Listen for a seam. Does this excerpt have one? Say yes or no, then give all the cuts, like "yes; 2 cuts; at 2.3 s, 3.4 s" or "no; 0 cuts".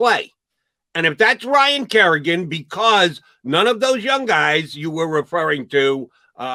no; 0 cuts